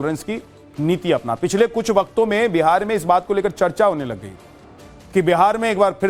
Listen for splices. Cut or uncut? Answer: uncut